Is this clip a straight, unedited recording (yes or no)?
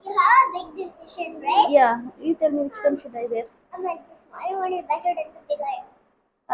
yes